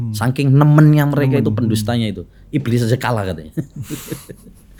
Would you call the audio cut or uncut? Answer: uncut